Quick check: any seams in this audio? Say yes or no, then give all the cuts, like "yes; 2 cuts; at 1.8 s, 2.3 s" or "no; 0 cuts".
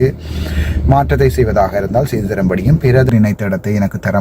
yes; 1 cut; at 3.1 s